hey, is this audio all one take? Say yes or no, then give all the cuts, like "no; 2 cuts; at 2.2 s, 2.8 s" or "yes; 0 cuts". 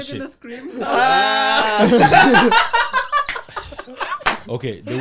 yes; 0 cuts